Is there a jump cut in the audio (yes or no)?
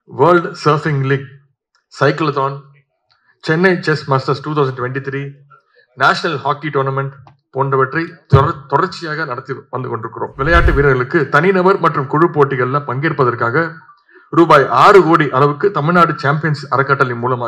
yes